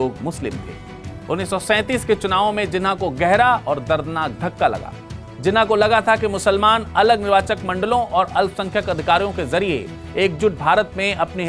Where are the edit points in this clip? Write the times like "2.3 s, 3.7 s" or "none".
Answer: none